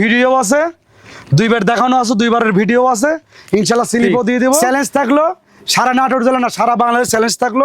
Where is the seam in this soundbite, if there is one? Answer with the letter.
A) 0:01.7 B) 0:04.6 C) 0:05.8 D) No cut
B